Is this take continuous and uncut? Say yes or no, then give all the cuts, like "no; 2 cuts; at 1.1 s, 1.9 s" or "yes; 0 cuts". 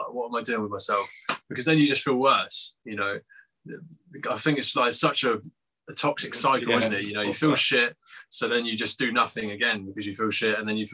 yes; 0 cuts